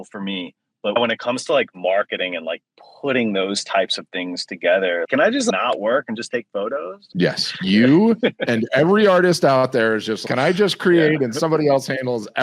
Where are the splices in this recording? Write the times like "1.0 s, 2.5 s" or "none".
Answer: 1.0 s